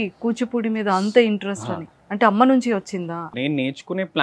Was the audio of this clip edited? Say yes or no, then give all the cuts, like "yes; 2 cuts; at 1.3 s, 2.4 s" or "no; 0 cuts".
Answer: yes; 1 cut; at 3.3 s